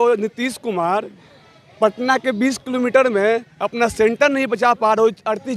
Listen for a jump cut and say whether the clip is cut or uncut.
uncut